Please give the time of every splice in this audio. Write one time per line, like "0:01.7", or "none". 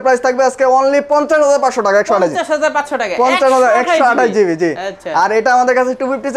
none

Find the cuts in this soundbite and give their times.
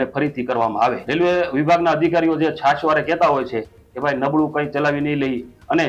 0:01.0

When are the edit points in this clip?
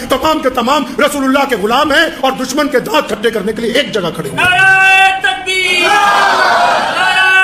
none

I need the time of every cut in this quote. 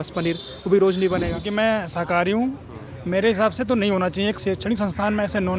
0:01.4

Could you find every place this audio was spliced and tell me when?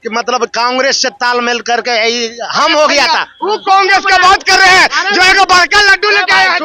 none

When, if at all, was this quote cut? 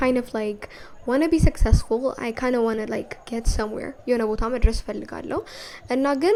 none

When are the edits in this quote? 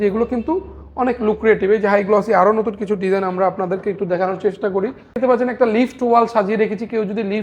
0:05.2

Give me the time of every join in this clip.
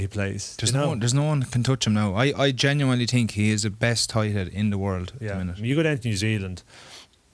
0:05.6

